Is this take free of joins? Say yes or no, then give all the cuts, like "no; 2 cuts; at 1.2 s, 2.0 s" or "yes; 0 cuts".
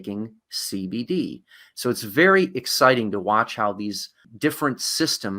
no; 1 cut; at 4.2 s